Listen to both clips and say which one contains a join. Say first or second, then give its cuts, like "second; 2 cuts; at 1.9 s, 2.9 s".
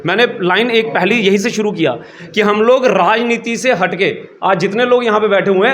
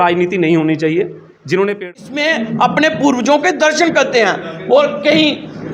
second; 1 cut; at 2.0 s